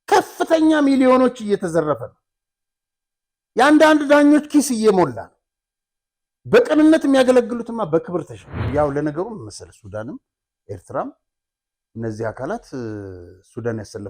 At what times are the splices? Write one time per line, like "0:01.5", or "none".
0:08.7